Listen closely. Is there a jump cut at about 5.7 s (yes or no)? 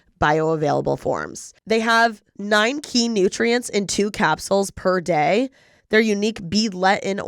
no